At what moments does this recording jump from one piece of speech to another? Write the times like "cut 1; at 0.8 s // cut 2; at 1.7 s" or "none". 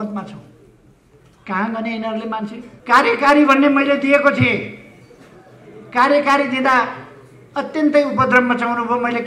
cut 1; at 2.7 s